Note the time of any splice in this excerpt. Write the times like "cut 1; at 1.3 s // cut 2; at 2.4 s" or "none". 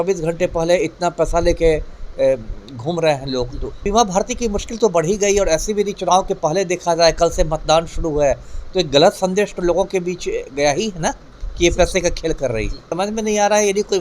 cut 1; at 3.8 s // cut 2; at 12.9 s

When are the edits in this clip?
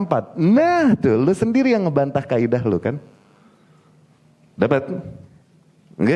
none

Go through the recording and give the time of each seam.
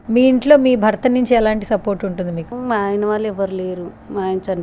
cut 1; at 2.5 s

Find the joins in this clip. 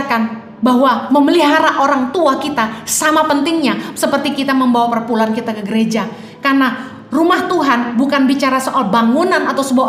none

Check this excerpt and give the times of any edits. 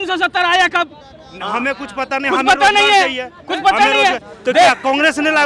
none

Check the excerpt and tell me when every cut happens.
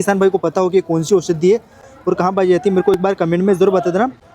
none

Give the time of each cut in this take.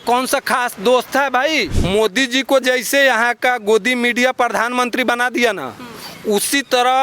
cut 1; at 1.8 s

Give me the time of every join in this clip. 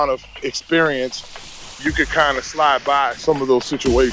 cut 1; at 1.8 s // cut 2; at 3.2 s

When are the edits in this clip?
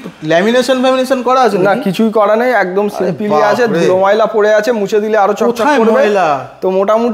none

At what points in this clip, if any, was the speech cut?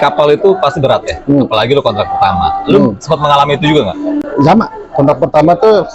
none

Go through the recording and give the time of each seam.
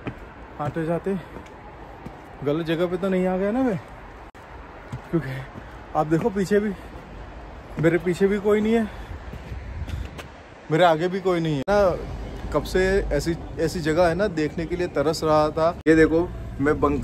cut 1; at 11.7 s // cut 2; at 15.8 s

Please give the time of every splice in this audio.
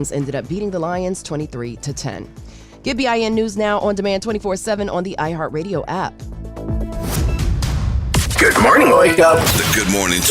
cut 1; at 8.0 s

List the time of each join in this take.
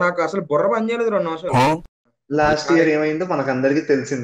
cut 1; at 1.9 s

